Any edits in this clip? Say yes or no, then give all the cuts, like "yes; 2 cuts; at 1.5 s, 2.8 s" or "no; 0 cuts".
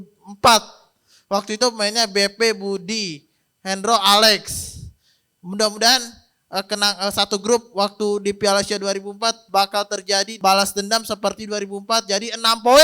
yes; 1 cut; at 10.4 s